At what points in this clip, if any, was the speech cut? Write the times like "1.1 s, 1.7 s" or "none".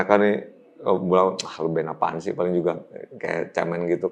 none